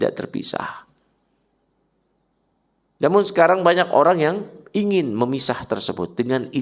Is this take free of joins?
yes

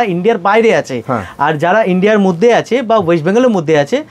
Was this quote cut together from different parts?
no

